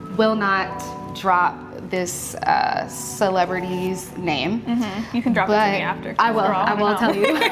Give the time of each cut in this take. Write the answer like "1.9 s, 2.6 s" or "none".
none